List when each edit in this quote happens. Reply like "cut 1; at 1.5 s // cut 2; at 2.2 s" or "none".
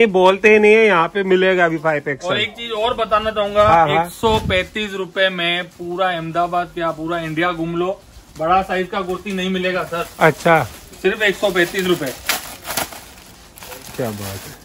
none